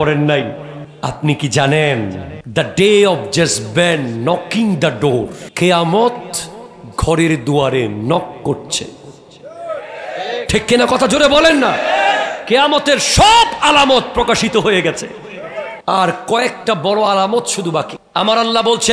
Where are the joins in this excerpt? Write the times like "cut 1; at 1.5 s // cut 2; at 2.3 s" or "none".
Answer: none